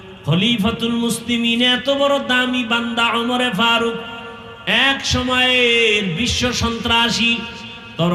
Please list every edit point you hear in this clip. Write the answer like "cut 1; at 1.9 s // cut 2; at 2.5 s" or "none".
none

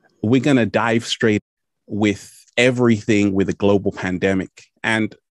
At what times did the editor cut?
none

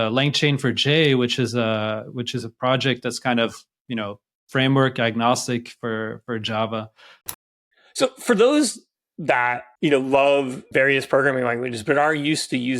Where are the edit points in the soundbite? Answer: cut 1; at 7.3 s // cut 2; at 9.6 s // cut 3; at 10.6 s

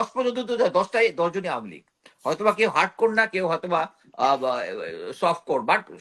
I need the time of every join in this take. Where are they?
none

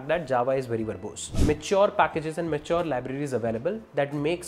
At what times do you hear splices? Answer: cut 1; at 1.4 s

